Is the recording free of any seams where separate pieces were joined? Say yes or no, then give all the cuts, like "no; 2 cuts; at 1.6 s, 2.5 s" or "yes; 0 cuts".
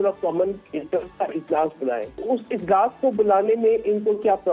no; 1 cut; at 2.1 s